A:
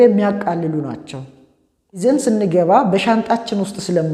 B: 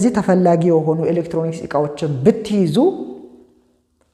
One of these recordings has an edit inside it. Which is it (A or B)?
A